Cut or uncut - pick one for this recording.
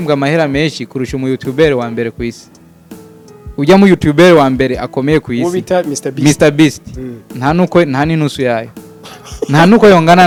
uncut